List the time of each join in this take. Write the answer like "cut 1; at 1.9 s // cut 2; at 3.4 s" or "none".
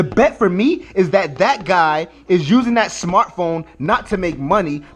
none